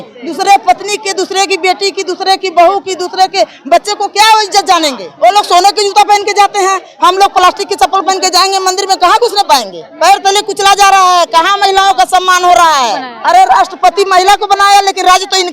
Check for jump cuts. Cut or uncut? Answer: cut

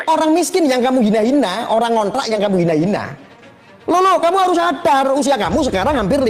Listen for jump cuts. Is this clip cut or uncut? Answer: uncut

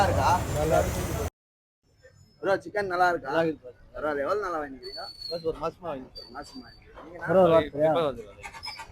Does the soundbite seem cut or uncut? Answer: uncut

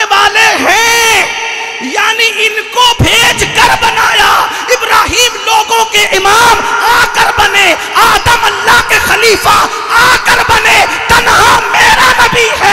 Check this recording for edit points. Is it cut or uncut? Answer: cut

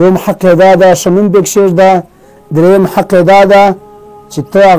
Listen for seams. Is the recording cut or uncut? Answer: uncut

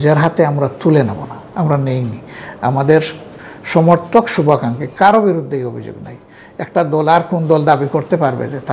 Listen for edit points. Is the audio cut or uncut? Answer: uncut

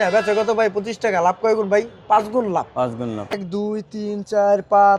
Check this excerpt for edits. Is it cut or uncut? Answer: cut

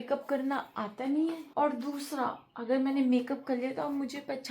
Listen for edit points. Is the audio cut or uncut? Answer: cut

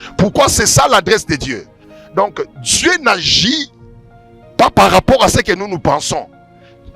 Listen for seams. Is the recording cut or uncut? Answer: cut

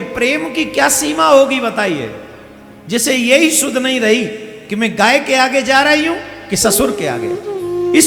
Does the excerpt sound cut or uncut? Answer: uncut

